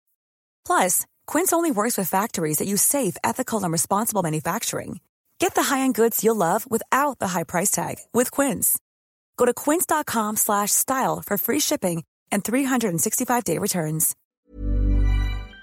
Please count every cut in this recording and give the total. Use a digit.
1